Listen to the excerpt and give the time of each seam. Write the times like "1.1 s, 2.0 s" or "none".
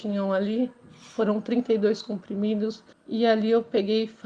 2.9 s